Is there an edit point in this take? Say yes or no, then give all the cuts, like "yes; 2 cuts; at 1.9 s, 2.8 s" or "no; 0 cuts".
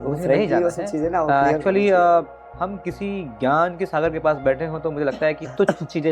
yes; 1 cut; at 2.4 s